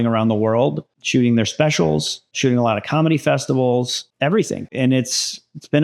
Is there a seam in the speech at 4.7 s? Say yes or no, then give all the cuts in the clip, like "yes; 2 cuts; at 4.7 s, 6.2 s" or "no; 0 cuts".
yes; 1 cut; at 4.7 s